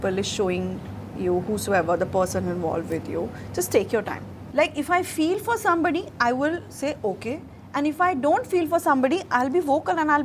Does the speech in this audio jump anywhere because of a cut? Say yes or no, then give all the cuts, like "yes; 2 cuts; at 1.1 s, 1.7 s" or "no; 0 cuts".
yes; 1 cut; at 4.3 s